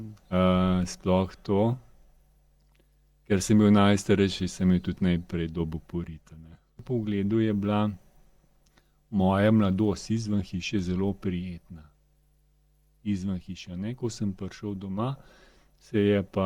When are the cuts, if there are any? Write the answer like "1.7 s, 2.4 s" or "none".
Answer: 6.8 s